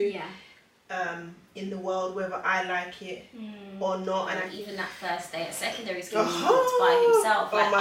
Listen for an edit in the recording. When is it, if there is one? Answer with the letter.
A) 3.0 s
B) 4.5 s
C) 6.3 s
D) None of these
B